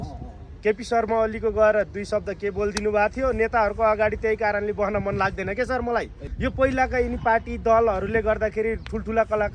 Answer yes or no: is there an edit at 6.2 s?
yes